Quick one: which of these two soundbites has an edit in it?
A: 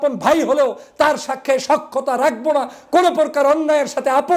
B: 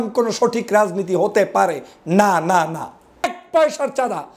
B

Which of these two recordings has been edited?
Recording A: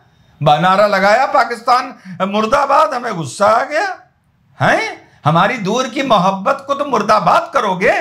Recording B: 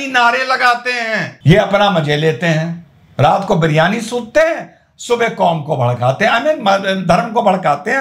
B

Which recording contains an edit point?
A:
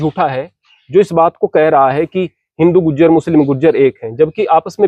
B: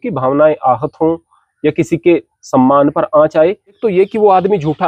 B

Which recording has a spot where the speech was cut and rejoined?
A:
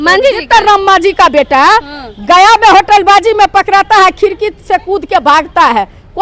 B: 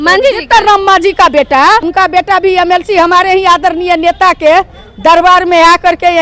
B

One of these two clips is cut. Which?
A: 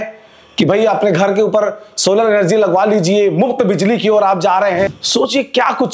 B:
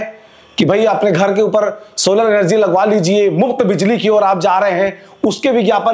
A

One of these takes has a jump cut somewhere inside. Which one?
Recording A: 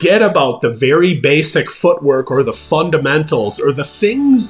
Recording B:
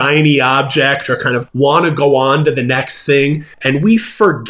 B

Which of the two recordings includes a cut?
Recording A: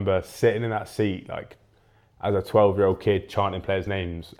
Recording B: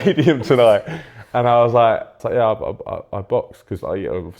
B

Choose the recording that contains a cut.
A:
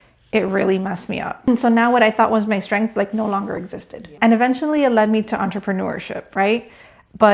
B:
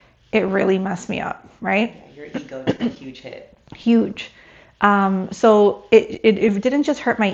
A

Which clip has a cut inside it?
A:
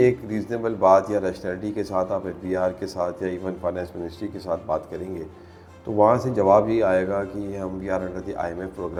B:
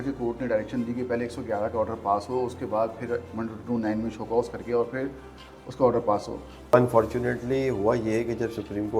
B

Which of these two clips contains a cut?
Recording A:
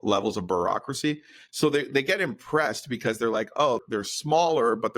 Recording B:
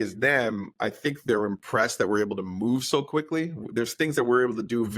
A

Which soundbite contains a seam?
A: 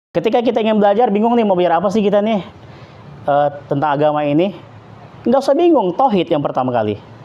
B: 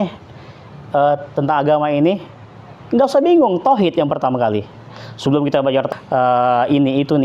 B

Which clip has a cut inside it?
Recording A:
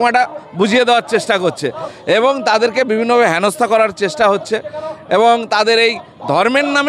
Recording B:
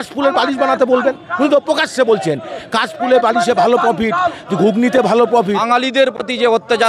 B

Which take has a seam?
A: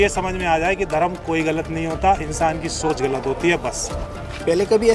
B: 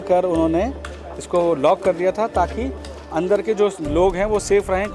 A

